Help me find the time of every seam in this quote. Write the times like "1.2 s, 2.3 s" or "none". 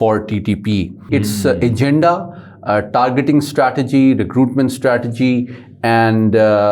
1.0 s